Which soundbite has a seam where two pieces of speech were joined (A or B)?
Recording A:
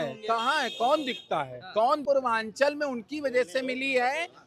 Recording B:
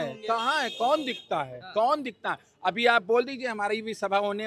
A